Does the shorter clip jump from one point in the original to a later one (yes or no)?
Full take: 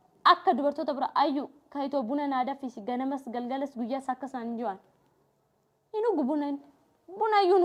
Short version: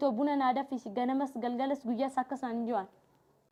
no